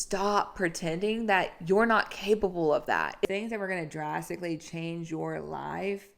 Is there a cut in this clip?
yes; 1 cut; at 3.2 s

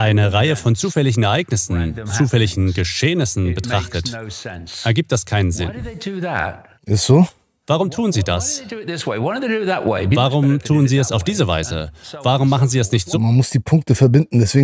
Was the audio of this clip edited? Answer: no; 0 cuts

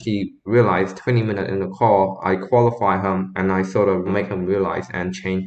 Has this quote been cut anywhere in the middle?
no; 0 cuts

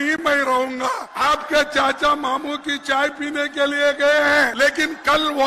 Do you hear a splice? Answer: yes; 2 cuts; at 1.1 s, 4.5 s

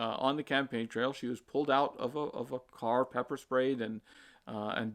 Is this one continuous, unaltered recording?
yes; 0 cuts

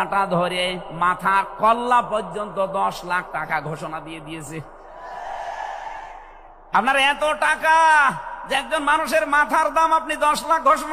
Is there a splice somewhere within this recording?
no; 0 cuts

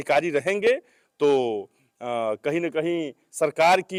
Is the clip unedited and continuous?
yes; 0 cuts

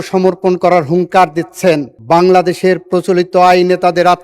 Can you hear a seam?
yes; 1 cut; at 1.9 s

